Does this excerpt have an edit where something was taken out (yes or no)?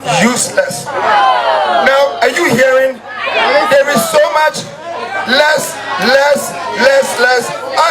no